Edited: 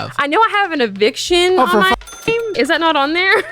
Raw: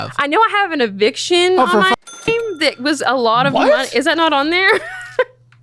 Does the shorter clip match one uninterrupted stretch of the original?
no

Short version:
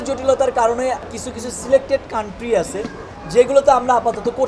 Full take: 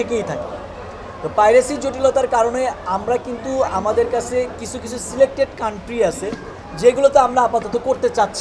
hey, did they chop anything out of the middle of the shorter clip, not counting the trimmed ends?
yes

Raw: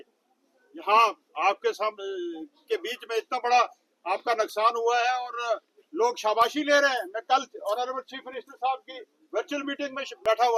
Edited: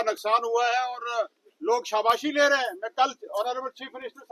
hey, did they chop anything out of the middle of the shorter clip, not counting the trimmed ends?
no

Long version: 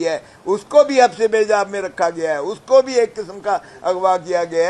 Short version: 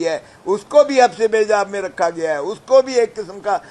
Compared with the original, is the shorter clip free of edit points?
yes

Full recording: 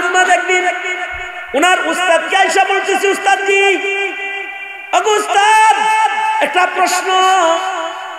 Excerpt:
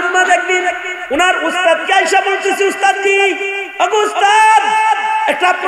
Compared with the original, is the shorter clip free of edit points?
no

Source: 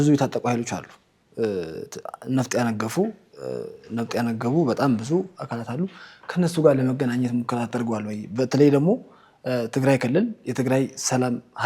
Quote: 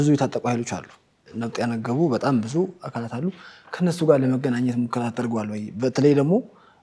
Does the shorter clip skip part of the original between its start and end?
yes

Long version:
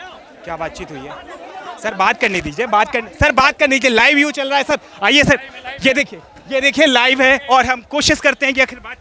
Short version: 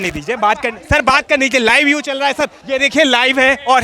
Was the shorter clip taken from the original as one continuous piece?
no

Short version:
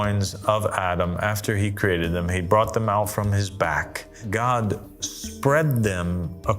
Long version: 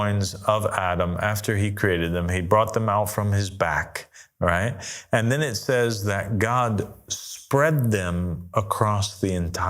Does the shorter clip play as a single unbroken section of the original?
no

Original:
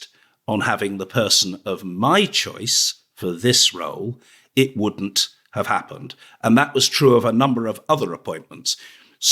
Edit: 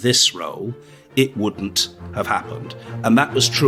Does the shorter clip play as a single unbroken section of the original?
yes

